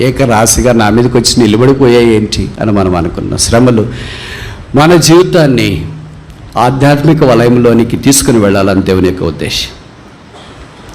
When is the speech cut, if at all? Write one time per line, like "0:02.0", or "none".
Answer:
none